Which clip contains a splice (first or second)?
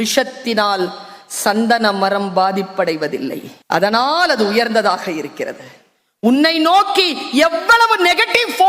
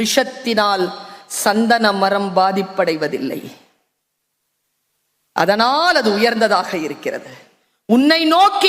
first